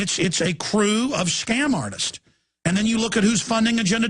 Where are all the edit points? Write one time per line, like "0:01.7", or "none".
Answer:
0:03.0